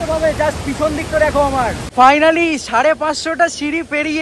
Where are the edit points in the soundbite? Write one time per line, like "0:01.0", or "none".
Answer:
0:01.9